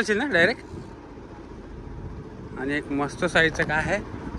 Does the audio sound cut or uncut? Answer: uncut